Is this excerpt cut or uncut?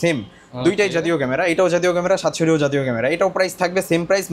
uncut